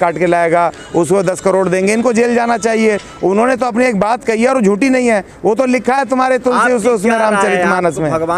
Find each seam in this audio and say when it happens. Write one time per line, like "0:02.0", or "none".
none